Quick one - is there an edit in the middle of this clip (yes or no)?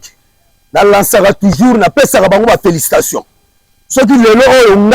no